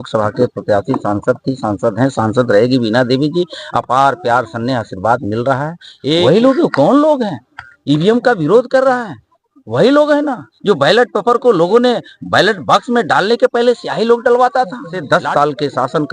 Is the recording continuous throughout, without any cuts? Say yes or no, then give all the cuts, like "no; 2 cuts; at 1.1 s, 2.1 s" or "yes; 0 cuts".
no; 2 cuts; at 6.2 s, 15.0 s